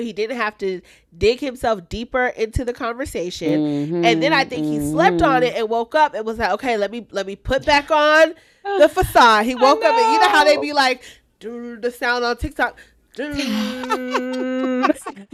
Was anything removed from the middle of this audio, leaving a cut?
no; 0 cuts

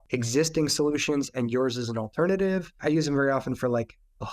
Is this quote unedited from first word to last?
no; 1 cut; at 2.8 s

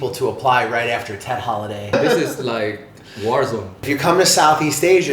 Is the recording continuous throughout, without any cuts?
no; 2 cuts; at 1.9 s, 3.9 s

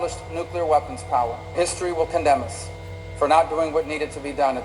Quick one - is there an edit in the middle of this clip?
yes; 1 cut; at 1.6 s

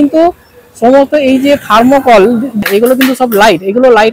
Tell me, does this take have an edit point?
yes; 1 cut; at 2.6 s

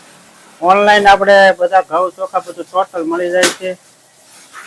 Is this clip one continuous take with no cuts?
yes; 0 cuts

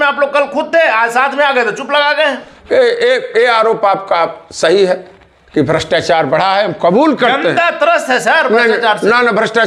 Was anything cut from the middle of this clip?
no; 0 cuts

